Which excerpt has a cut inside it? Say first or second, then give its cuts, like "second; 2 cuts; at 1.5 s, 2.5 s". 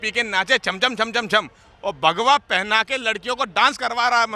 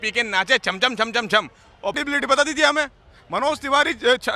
second; 1 cut; at 2.0 s